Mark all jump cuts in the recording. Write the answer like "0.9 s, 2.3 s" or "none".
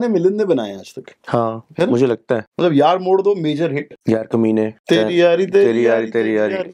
2.5 s, 3.9 s, 4.8 s